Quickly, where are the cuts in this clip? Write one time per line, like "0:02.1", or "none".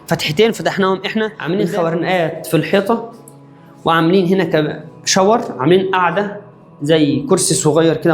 0:01.4